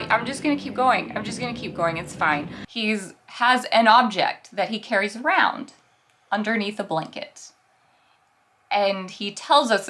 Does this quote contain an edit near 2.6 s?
yes; 1 cut; at 2.6 s

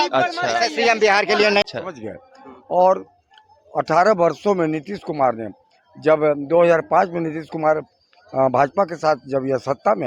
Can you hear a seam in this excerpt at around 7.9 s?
no; 1 cut; at 1.6 s

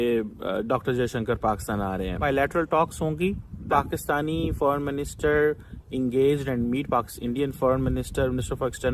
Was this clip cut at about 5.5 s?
no; 2 cuts; at 2.2 s, 3.7 s

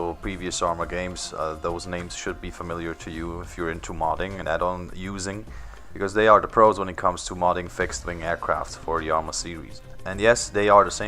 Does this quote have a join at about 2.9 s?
yes; 1 cut; at 2.9 s

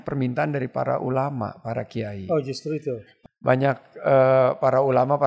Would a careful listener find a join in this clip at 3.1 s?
yes; 1 cut; at 3.1 s

